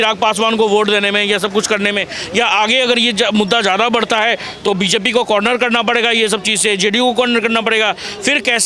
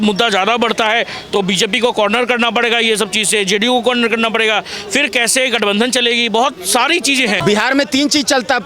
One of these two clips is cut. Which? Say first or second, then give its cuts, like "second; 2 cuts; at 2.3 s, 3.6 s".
second; 1 cut; at 7.4 s